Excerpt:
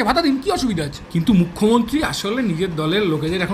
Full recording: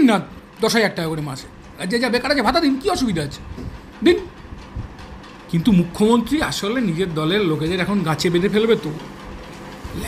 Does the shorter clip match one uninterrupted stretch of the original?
no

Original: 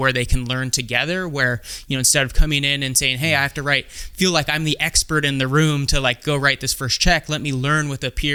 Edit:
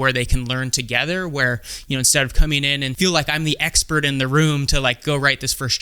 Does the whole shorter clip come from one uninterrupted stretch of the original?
no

